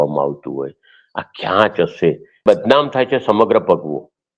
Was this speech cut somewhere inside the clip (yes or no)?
yes